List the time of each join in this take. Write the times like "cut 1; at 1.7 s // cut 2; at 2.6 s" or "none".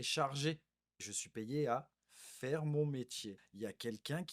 cut 1; at 1.2 s // cut 2; at 3.4 s